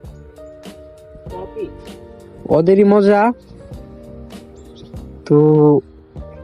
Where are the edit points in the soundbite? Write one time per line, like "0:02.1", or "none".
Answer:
0:03.4
0:05.3

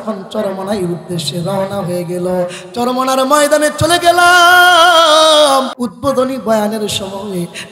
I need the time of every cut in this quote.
0:05.8

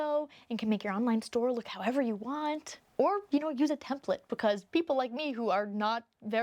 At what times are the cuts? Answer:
none

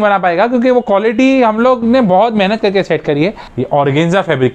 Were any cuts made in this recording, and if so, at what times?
0:03.5

